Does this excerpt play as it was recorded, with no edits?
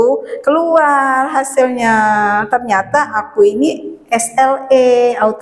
yes; 0 cuts

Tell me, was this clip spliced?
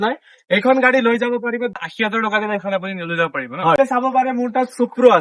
yes; 2 cuts; at 1.8 s, 3.8 s

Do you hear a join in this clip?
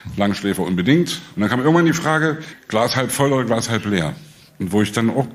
yes; 2 cuts; at 1.2 s, 2.5 s

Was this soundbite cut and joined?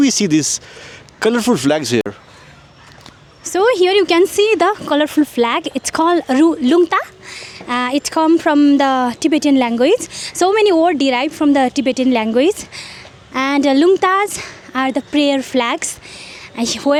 no; 0 cuts

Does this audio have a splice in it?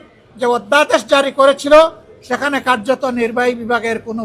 no; 0 cuts

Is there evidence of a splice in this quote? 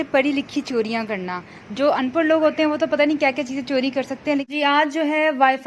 yes; 1 cut; at 4.5 s

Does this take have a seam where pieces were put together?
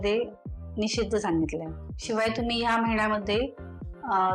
yes; 1 cut; at 1.8 s

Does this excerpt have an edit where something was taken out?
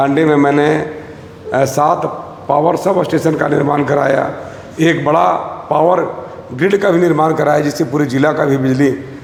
no; 0 cuts

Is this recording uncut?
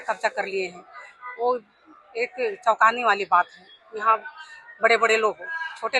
yes; 0 cuts

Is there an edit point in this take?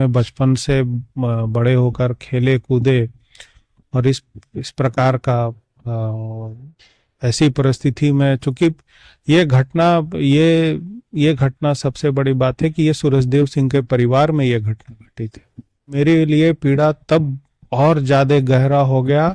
yes; 1 cut; at 16.0 s

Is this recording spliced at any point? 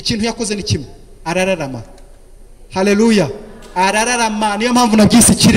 no; 0 cuts

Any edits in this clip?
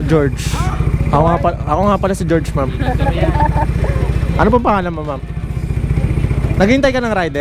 no; 0 cuts

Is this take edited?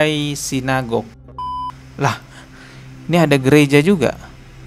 yes; 1 cut; at 1.6 s

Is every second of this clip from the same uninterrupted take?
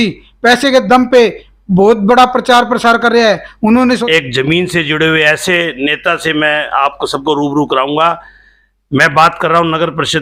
no; 1 cut; at 4.0 s

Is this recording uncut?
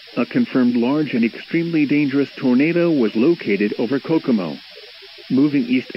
no; 2 cuts; at 1.0 s, 2.9 s

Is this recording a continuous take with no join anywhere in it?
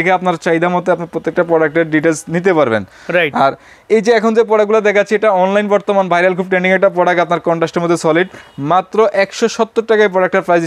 yes; 0 cuts

